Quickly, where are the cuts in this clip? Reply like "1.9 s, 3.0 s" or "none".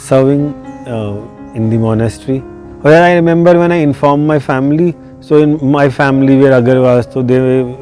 2.6 s